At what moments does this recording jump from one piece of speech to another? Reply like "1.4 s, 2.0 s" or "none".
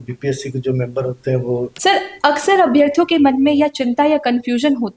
1.7 s